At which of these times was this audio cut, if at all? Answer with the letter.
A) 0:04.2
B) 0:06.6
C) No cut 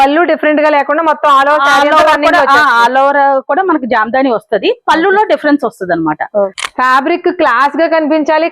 B